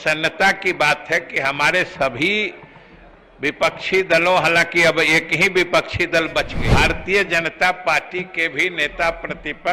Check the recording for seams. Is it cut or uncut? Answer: cut